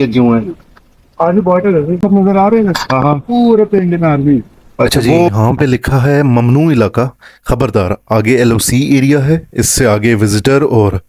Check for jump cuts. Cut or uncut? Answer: cut